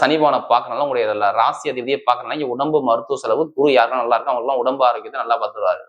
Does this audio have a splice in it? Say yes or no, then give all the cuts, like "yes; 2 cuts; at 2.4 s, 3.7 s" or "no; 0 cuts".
no; 0 cuts